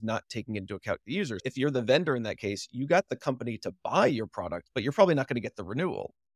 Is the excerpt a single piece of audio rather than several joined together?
yes; 0 cuts

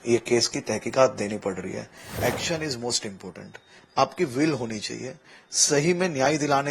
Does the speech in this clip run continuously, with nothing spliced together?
no; 1 cut; at 2.1 s

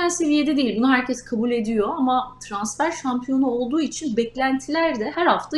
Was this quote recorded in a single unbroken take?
yes; 0 cuts

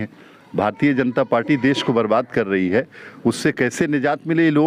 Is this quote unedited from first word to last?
yes; 0 cuts

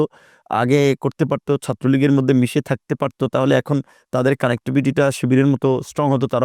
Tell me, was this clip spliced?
no; 0 cuts

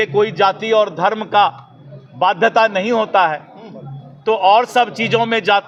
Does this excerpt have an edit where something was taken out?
no; 0 cuts

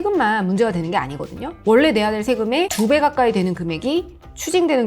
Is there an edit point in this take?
yes; 1 cut; at 1.6 s

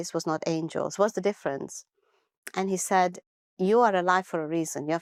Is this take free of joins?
yes; 0 cuts

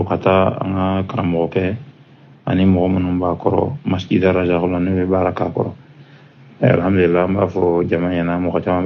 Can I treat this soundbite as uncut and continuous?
yes; 0 cuts

